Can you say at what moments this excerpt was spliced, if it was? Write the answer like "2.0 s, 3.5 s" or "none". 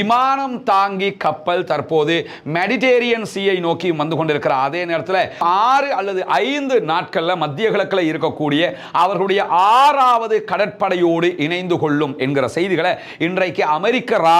none